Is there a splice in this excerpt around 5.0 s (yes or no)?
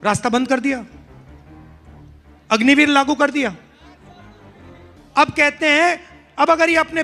no